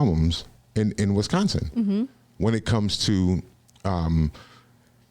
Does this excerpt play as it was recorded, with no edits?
yes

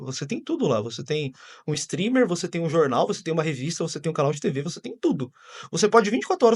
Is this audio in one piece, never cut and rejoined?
yes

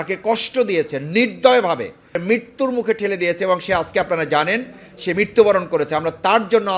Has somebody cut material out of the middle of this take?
yes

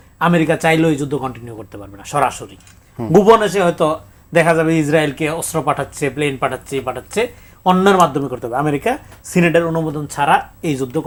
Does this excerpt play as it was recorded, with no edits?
yes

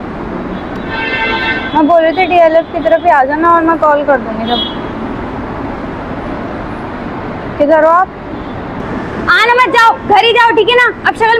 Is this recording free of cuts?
no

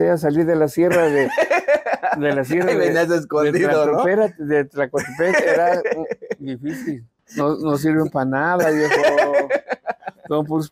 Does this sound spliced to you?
yes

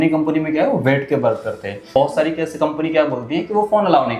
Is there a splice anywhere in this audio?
yes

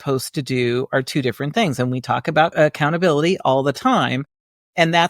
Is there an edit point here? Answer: yes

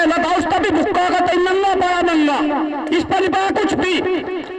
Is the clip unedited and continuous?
yes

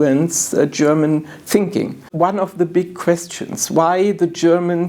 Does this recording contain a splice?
yes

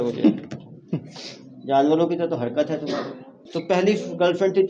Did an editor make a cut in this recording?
yes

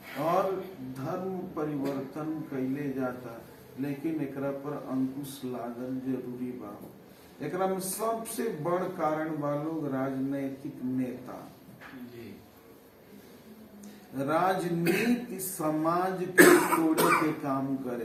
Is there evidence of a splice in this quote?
no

